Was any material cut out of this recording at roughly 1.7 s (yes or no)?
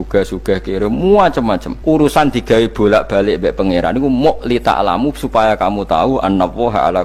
yes